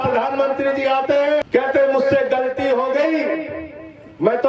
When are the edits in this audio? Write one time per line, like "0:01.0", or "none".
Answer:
0:01.5